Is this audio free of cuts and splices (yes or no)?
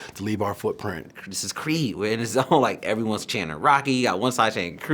no